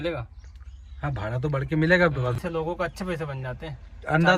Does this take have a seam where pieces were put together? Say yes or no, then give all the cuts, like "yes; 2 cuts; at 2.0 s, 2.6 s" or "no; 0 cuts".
yes; 1 cut; at 2.3 s